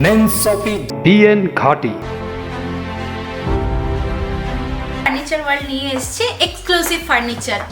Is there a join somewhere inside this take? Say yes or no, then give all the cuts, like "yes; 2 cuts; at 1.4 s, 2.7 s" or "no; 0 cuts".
yes; 3 cuts; at 0.9 s, 2.0 s, 5.0 s